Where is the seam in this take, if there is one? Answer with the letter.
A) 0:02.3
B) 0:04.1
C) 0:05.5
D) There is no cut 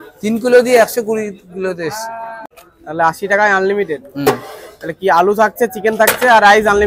A